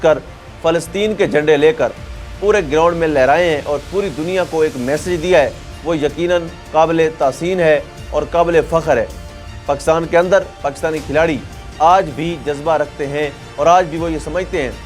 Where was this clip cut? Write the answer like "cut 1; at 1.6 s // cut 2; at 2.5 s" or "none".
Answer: none